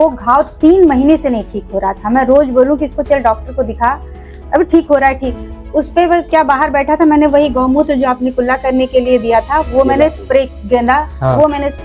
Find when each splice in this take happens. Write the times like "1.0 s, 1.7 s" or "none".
none